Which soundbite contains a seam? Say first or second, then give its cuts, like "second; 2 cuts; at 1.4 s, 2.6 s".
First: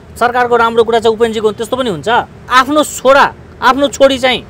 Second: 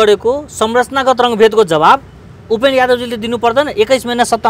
first; 1 cut; at 2.4 s